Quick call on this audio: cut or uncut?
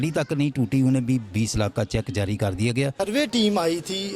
cut